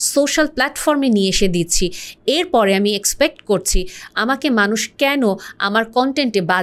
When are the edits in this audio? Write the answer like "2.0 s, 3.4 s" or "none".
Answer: none

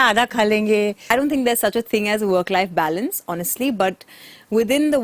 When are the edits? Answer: 1.0 s

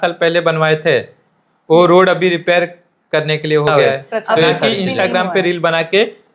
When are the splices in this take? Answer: 4.7 s

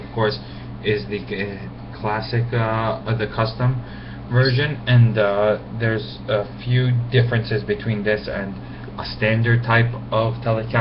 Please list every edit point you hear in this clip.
8.6 s

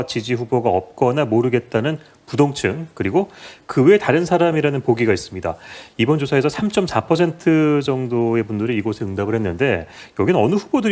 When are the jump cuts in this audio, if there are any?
none

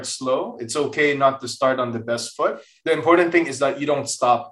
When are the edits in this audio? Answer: 2.7 s

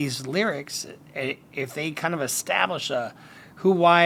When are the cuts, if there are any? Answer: none

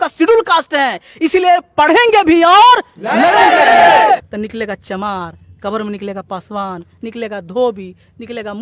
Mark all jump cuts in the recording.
4.3 s

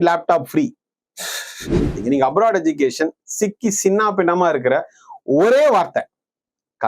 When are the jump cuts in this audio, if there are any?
2.0 s

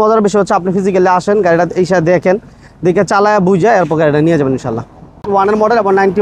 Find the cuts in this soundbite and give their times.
5.3 s

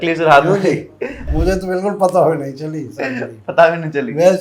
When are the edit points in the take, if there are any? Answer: 1.3 s

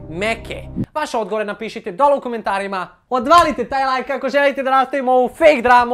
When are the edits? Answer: 2.9 s

